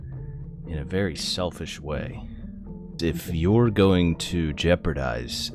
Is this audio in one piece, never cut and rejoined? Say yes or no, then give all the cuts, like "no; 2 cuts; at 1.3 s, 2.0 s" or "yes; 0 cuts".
no; 1 cut; at 2.9 s